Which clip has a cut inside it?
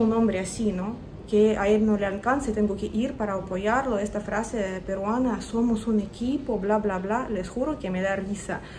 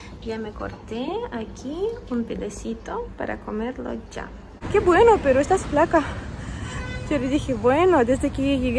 second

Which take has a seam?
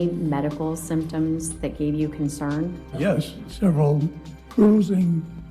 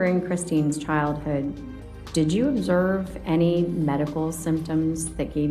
first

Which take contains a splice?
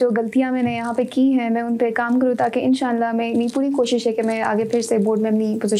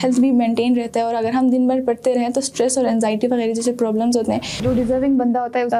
second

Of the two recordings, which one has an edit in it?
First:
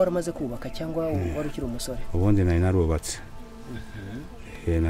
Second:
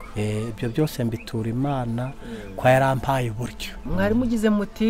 second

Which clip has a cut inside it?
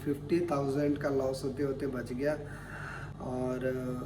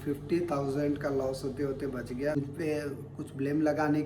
second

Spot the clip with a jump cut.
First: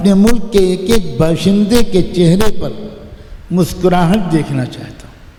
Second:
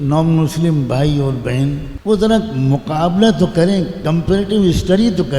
second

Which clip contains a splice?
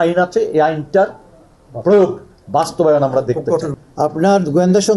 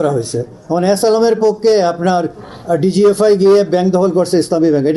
first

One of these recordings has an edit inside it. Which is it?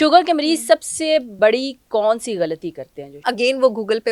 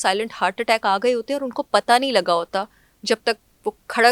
first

